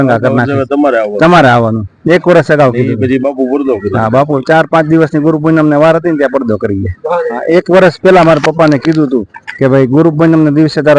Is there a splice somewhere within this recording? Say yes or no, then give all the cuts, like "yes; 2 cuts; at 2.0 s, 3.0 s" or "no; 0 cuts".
yes; 1 cut; at 7.4 s